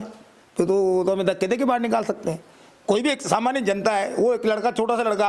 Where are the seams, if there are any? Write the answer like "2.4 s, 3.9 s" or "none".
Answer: none